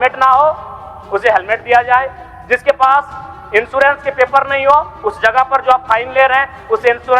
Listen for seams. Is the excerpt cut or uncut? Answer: uncut